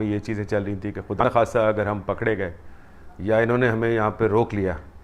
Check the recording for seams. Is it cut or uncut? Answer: cut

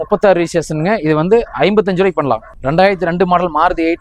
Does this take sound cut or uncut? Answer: uncut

